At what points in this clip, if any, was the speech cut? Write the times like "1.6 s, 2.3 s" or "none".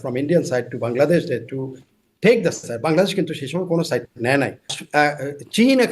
4.8 s